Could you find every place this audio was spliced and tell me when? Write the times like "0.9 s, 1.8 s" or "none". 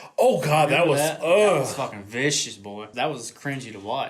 2.9 s